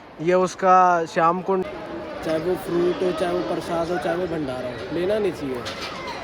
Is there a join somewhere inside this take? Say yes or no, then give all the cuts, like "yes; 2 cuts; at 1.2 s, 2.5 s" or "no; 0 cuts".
yes; 1 cut; at 1.6 s